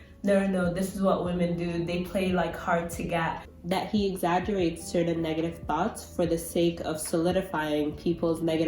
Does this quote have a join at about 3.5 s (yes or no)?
yes